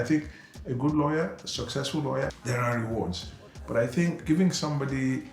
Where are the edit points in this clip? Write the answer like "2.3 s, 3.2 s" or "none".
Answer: 2.4 s, 4.2 s